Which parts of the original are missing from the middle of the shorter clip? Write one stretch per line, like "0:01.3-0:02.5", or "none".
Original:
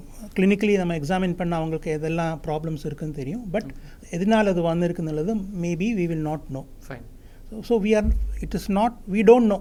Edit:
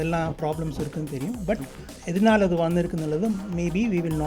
none